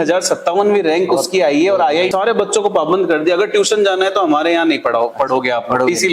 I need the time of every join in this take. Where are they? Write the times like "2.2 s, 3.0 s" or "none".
2.1 s